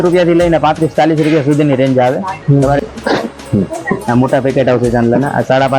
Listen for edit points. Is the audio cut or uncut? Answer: cut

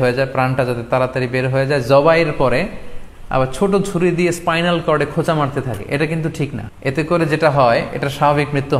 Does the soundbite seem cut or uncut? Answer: cut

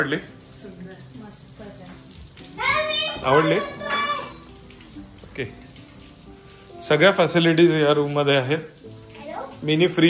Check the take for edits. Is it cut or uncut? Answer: uncut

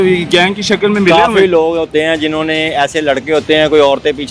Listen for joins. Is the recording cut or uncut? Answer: uncut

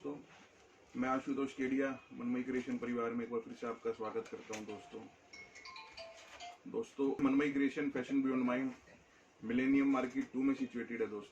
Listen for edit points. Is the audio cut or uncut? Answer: cut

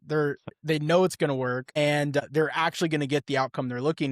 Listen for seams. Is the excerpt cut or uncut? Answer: cut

